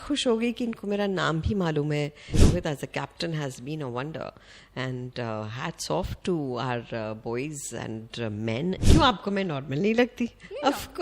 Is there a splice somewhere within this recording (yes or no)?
yes